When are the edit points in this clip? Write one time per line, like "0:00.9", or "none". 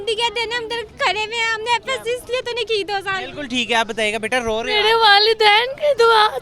none